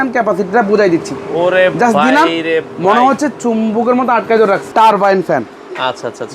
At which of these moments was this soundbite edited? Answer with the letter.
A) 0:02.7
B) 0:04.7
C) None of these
B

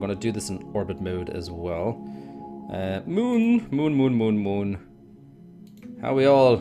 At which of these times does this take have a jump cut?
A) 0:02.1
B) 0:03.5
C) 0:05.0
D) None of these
D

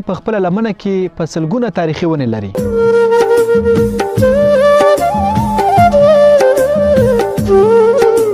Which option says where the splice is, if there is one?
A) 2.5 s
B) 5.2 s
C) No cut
A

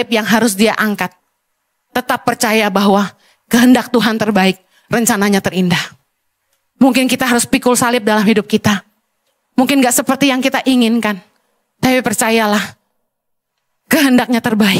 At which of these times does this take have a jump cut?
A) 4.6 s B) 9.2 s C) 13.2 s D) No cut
D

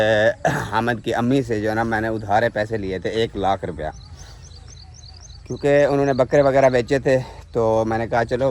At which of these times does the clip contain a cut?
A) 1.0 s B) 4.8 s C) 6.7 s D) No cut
D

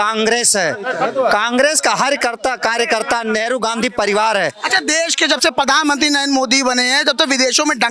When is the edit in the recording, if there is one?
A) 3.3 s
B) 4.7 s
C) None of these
C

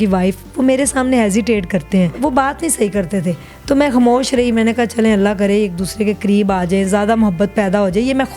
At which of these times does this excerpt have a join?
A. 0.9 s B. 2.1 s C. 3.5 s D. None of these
B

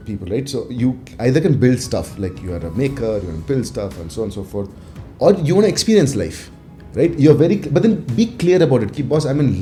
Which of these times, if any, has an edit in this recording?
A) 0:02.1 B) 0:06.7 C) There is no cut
C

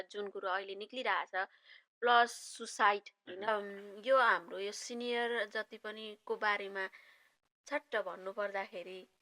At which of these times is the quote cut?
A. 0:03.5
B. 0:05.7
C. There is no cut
A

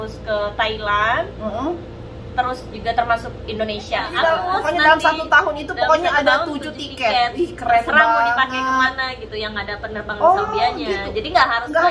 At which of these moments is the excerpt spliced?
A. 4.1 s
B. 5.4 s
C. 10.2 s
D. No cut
A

